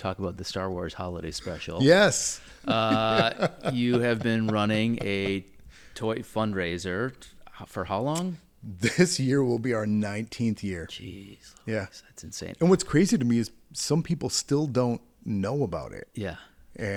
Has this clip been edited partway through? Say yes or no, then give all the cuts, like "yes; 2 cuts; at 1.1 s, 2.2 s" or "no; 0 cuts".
no; 0 cuts